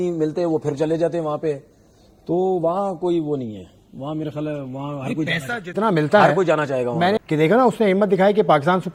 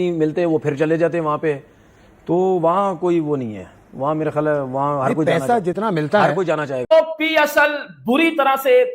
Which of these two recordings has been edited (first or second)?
second